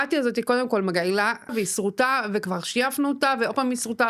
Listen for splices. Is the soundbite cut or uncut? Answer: cut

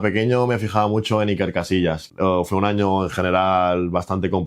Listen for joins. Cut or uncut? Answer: cut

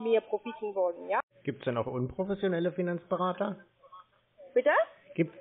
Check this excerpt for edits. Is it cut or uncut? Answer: cut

